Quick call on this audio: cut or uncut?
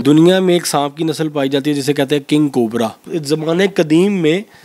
cut